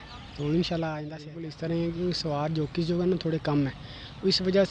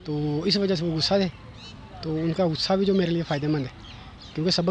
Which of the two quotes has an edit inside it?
first; 1 cut; at 1.4 s

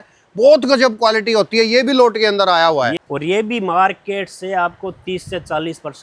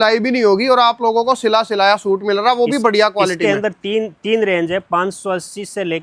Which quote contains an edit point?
first; 1 cut; at 3.0 s

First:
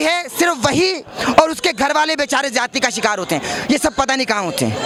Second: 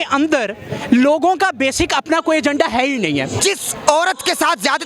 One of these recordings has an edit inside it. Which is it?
second; 1 cut; at 3.4 s

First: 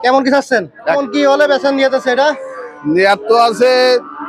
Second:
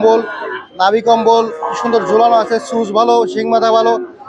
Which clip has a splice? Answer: first; 1 cut; at 1.0 s

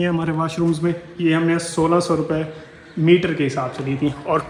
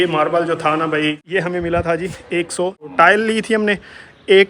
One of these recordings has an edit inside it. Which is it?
second; 2 cuts; at 1.2 s, 2.9 s

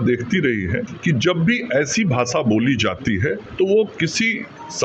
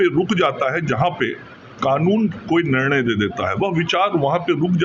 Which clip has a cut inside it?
first; 2 cuts; at 0.9 s, 3.4 s

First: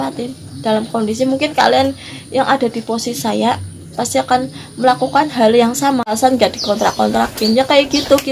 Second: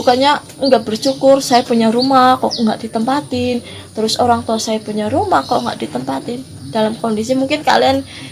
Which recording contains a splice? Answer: first; 1 cut; at 6.2 s

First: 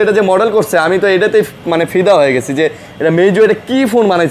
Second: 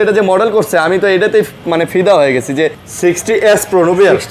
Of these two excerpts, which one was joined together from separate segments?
second; 1 cut; at 2.8 s

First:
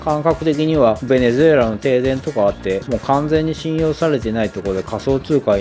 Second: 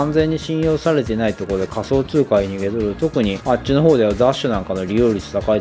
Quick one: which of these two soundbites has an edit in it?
second; 1 cut; at 3.4 s

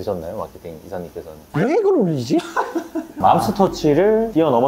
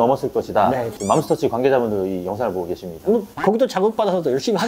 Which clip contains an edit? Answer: first; 1 cut; at 3.2 s

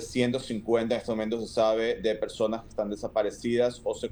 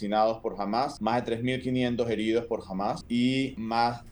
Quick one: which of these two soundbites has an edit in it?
second; 2 cuts; at 0.9 s, 3.2 s

